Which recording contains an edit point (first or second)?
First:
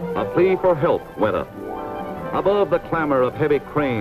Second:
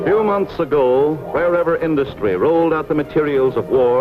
first